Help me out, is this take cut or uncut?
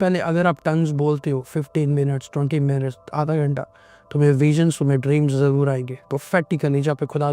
uncut